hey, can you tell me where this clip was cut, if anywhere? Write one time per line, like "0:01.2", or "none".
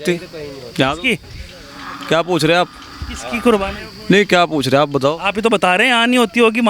none